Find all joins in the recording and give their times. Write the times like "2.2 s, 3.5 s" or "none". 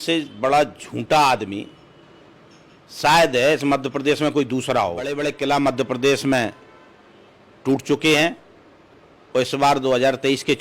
5.3 s